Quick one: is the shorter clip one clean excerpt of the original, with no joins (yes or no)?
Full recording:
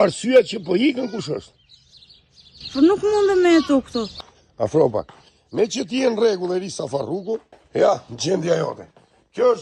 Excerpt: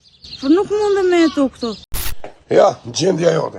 no